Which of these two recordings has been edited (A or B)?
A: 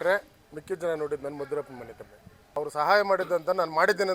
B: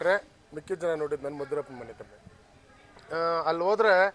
A